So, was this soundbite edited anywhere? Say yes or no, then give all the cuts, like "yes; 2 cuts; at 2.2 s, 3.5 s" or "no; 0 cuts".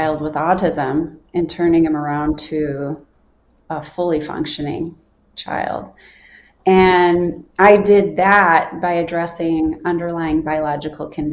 no; 0 cuts